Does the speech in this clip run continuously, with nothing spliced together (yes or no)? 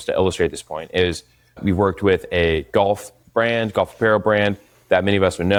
yes